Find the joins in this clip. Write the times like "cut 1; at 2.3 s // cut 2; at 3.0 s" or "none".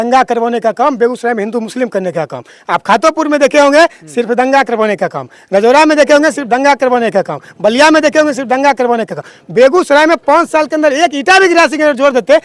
none

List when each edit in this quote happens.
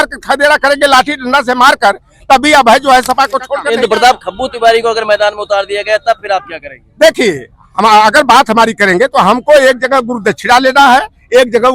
cut 1; at 3.6 s

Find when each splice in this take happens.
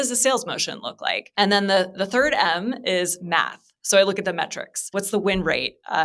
cut 1; at 1.2 s // cut 2; at 4.9 s

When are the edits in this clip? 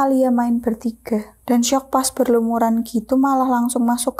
cut 1; at 1.4 s

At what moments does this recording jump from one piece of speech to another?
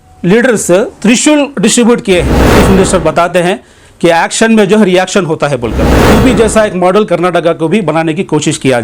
cut 1; at 2.6 s // cut 2; at 6.1 s

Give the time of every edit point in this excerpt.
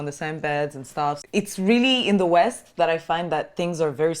cut 1; at 1.2 s

